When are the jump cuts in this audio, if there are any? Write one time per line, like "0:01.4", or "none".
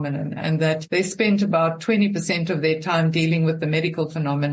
none